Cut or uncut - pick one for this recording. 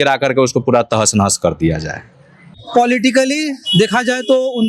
cut